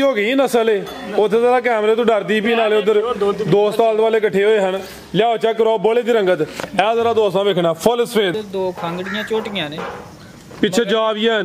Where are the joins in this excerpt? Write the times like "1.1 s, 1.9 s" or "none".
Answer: 8.3 s